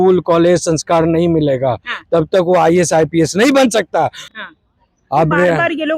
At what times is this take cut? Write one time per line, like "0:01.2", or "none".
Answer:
0:04.3